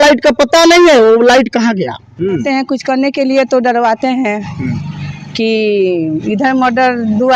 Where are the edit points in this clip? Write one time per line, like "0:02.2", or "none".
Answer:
0:02.4